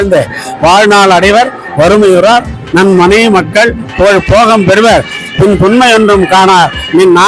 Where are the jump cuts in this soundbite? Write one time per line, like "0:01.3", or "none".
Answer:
none